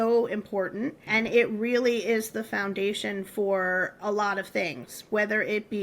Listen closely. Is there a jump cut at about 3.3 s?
no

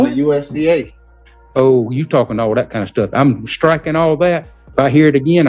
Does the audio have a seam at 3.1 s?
no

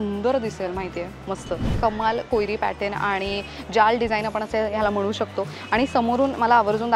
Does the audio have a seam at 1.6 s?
yes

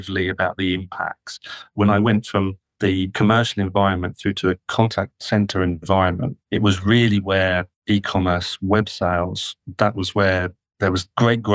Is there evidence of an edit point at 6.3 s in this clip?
yes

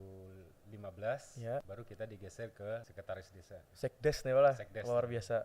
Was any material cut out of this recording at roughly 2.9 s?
yes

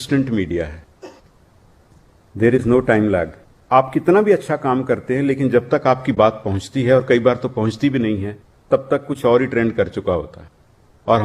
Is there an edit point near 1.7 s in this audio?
no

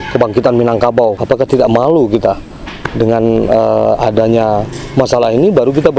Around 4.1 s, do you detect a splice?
no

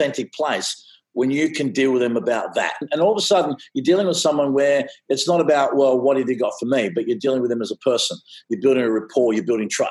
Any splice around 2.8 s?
yes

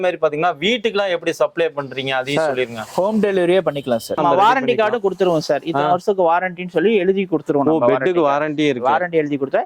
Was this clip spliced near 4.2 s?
yes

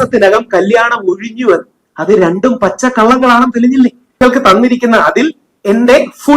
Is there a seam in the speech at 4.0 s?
yes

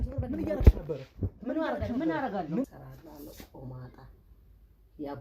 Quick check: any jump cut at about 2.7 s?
yes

